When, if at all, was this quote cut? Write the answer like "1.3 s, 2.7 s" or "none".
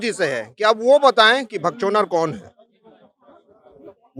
none